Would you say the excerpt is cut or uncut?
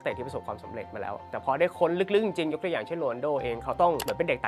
cut